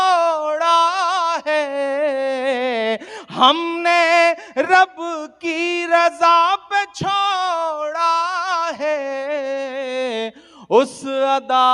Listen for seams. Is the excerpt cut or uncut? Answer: uncut